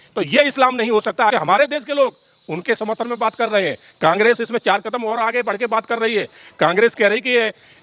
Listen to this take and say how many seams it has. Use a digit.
1